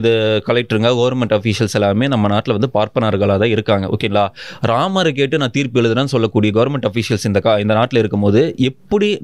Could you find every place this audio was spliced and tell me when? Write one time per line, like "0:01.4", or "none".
none